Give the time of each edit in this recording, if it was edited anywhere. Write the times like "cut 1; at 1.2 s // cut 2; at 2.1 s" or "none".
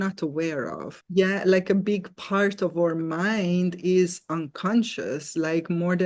none